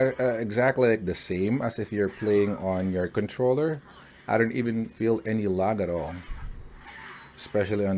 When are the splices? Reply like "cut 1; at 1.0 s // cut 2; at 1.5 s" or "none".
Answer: none

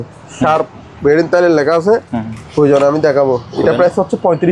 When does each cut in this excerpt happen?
none

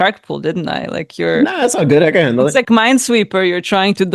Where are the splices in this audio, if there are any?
none

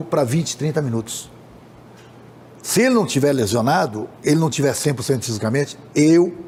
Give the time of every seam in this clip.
none

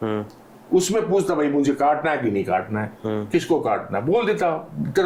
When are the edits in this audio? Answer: none

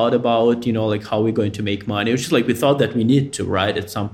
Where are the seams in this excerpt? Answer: none

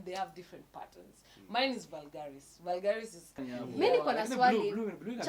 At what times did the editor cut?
cut 1; at 3.4 s

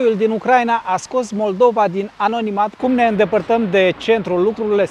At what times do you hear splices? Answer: cut 1; at 2.7 s

